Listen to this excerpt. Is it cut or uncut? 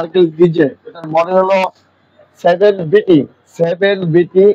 uncut